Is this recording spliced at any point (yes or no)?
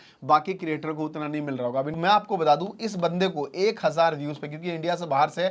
yes